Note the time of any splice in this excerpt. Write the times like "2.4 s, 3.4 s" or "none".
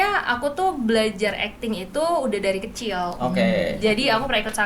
none